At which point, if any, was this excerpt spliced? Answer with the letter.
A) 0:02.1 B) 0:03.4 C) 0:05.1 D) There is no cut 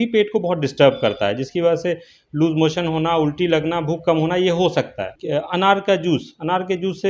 C